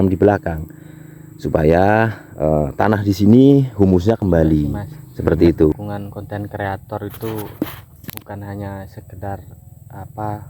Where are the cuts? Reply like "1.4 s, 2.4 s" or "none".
5.8 s

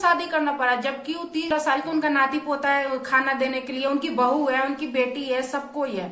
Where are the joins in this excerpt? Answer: 1.5 s

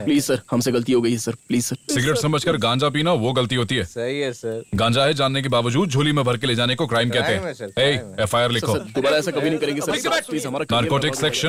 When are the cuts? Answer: none

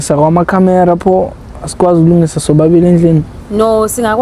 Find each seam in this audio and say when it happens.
none

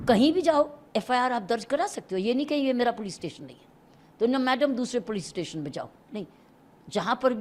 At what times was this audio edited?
none

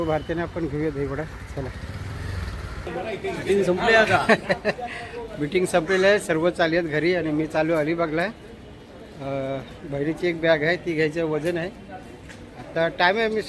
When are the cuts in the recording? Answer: 2.9 s

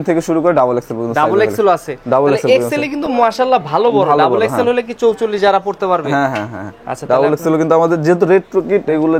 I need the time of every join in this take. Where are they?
none

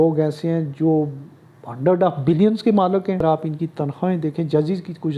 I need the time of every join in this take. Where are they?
3.2 s

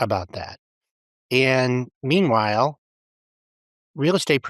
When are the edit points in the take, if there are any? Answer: none

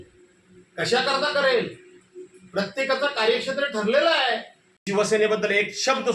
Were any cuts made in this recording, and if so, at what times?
4.8 s

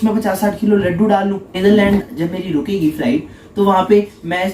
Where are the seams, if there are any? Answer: 1.5 s

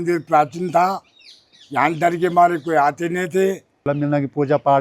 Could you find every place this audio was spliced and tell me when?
3.8 s

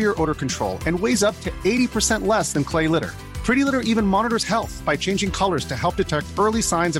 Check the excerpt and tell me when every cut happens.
none

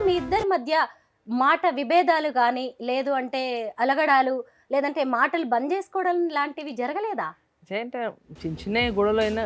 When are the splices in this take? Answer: none

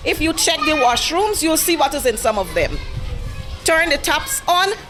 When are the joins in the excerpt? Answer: none

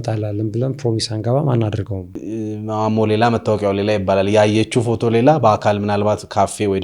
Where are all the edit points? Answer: 2.2 s

